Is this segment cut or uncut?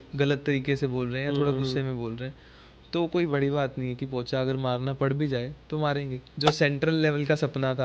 cut